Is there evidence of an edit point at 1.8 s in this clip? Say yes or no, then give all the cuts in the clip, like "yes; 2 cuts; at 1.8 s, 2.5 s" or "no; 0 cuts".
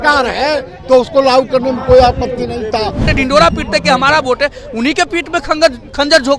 no; 1 cut; at 3.1 s